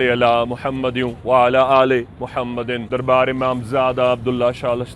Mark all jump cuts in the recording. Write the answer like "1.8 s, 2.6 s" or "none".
2.8 s